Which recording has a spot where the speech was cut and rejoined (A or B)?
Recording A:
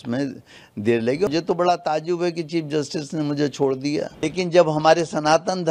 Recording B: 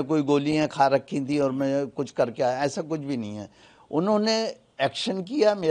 A